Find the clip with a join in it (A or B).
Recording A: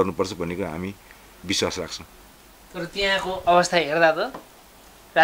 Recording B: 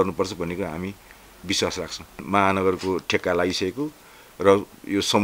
B